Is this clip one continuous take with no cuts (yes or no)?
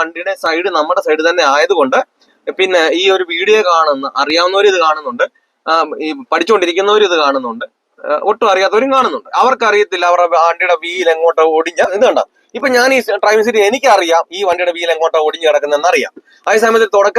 no